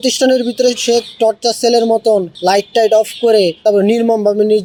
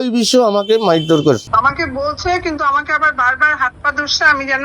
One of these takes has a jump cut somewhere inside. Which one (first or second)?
second